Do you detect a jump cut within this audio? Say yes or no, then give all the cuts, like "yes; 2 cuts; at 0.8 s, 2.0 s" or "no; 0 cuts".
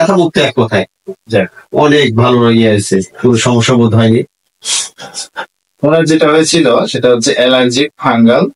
no; 0 cuts